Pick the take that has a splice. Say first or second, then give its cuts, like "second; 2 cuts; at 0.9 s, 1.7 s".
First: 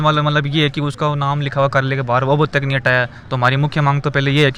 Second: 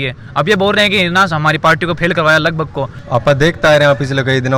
second; 1 cut; at 3.0 s